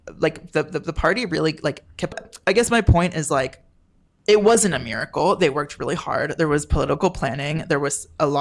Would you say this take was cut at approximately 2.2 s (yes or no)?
yes